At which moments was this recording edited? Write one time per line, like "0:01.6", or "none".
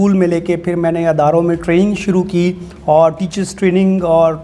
none